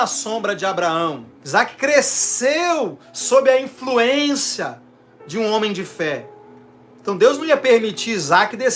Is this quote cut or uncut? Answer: cut